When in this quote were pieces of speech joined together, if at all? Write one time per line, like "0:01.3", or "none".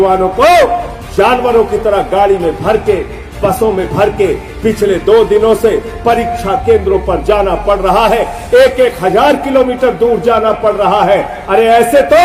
none